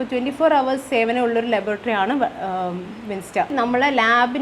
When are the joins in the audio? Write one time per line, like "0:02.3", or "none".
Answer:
0:03.5